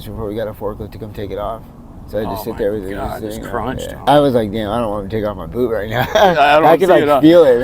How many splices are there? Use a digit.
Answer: 1